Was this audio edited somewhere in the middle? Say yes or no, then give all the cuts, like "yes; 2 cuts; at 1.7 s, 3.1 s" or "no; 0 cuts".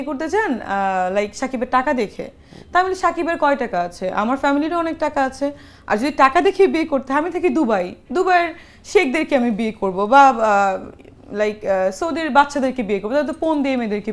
no; 0 cuts